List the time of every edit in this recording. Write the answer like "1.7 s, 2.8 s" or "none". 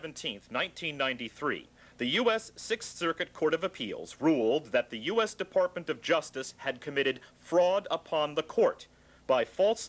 8.5 s